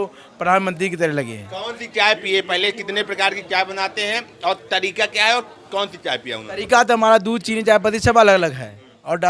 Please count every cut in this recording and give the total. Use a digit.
0